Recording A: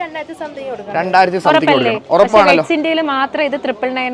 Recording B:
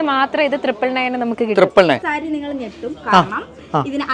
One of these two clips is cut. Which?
B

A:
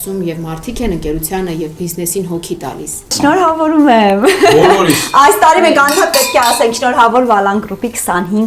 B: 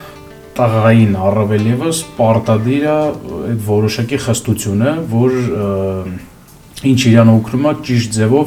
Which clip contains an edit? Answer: A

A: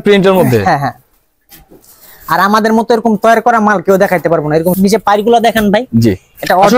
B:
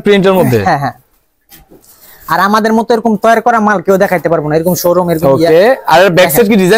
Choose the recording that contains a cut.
A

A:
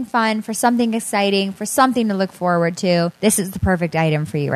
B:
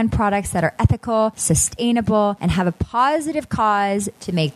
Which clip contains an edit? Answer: B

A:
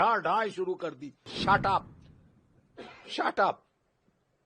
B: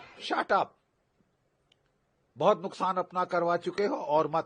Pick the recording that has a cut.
A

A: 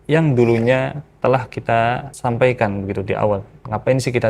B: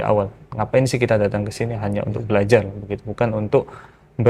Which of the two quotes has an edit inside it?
A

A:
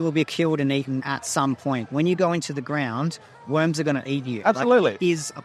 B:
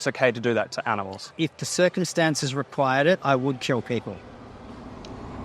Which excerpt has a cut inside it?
B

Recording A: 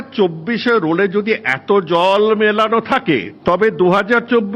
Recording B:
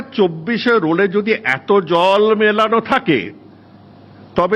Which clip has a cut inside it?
A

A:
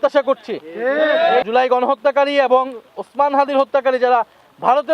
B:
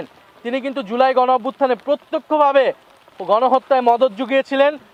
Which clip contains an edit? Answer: A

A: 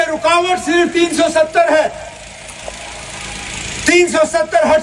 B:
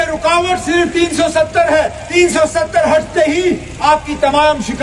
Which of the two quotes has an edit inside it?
B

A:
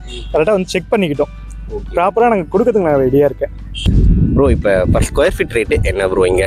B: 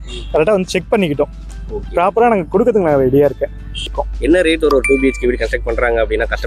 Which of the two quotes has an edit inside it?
B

